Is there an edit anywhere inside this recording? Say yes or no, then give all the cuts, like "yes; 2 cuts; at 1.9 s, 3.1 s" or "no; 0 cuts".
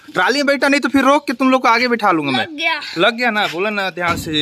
no; 0 cuts